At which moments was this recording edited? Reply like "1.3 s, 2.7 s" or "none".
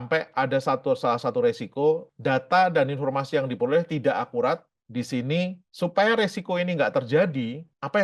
none